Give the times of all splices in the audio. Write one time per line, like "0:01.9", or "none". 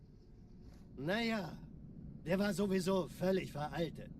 0:01.0